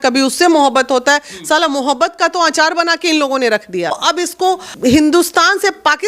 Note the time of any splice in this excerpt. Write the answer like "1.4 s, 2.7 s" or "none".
4.3 s